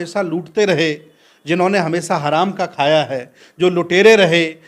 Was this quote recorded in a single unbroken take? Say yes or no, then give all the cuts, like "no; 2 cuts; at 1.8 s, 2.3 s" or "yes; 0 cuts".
yes; 0 cuts